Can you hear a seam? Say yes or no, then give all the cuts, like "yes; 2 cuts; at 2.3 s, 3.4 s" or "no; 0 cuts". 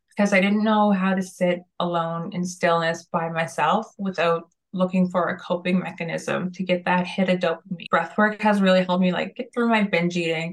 yes; 1 cut; at 7.7 s